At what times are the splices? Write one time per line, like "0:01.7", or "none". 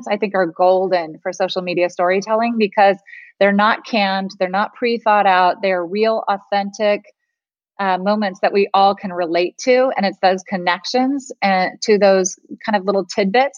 none